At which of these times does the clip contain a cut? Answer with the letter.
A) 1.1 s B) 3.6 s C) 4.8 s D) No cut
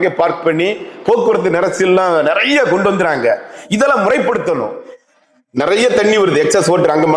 C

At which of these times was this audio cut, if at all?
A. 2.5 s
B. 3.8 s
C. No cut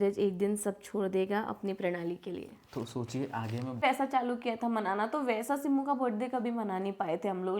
B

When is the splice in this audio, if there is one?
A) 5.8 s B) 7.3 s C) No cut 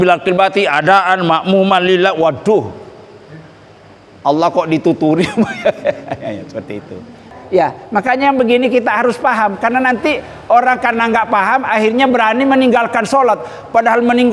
B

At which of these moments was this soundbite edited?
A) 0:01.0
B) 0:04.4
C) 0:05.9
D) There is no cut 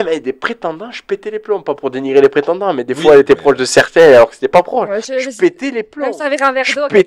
D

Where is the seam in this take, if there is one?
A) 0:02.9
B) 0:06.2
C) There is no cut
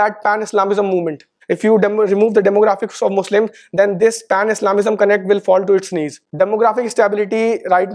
B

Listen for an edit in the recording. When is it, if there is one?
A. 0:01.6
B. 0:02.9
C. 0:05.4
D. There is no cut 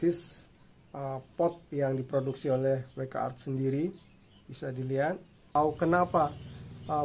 C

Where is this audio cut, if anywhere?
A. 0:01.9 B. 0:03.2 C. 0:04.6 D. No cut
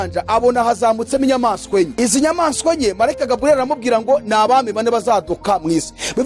A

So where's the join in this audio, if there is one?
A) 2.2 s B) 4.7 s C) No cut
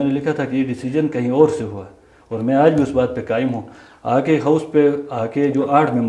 C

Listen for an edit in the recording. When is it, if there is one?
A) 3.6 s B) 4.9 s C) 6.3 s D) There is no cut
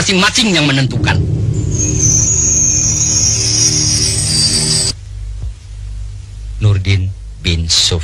B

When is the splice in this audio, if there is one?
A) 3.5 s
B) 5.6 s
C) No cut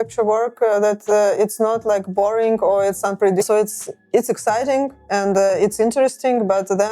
A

